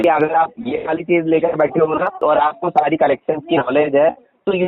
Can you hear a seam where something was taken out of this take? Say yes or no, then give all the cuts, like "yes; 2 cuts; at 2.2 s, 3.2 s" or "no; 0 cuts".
yes; 1 cut; at 2.1 s